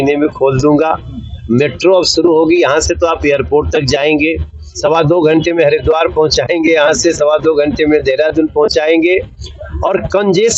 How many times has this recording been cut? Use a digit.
1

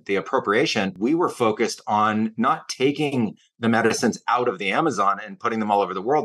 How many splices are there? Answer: 1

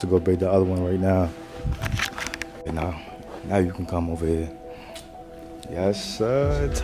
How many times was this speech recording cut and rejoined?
0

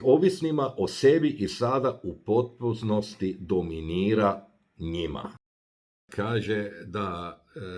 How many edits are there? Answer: 1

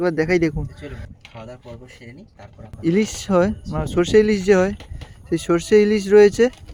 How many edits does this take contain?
0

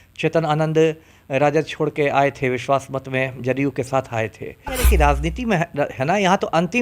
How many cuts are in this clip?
1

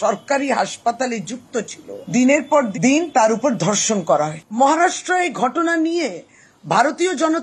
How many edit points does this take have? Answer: 1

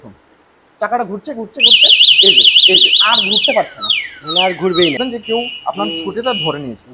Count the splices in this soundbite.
1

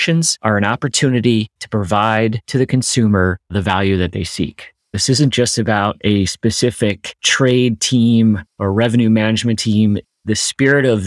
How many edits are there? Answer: 1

